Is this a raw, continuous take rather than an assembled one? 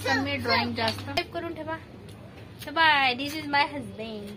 no; 1 cut; at 1.2 s

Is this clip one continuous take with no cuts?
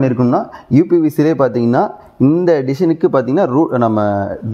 yes; 0 cuts

